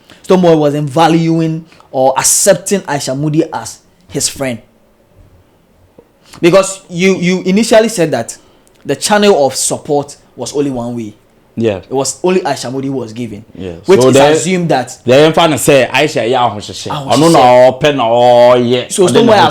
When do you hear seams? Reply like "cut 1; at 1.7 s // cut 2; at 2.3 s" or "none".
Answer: none